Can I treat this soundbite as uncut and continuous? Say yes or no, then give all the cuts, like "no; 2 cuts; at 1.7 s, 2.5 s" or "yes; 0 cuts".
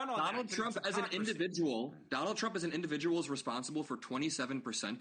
yes; 0 cuts